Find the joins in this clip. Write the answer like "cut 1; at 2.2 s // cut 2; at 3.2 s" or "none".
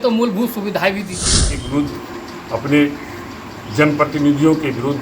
cut 1; at 1.6 s